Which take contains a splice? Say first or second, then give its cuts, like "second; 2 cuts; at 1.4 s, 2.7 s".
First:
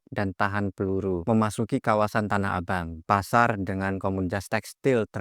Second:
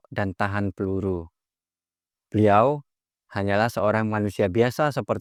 first; 1 cut; at 1.3 s